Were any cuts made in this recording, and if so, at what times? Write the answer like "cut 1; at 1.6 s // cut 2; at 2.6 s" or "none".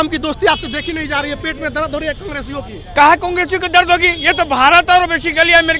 none